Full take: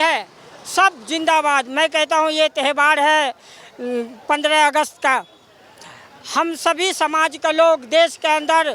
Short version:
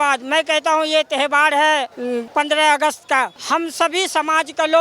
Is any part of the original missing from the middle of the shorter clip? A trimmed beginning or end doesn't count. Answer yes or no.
yes